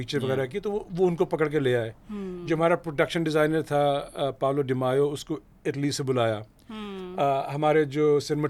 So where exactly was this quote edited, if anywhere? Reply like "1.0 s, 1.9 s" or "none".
none